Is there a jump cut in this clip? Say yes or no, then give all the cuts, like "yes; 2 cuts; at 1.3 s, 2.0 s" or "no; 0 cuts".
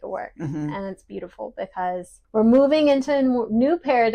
yes; 1 cut; at 2.2 s